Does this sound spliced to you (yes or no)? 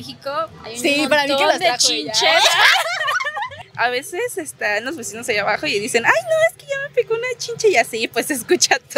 yes